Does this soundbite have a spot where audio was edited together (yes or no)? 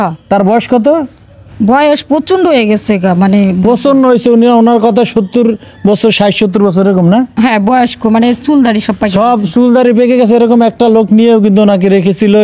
no